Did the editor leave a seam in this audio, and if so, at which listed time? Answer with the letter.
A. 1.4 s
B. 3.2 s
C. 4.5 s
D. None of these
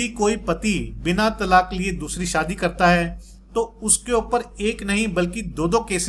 D